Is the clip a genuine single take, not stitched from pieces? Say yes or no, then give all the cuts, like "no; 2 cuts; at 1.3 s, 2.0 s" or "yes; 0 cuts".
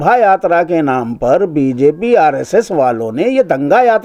yes; 0 cuts